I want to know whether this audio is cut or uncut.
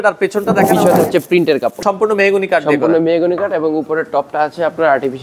cut